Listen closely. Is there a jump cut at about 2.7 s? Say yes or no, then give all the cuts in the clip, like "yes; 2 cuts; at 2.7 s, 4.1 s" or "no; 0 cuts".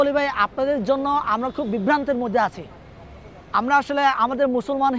no; 0 cuts